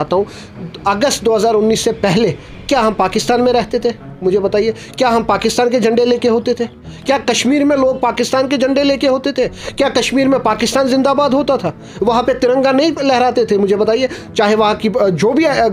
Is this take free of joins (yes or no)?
yes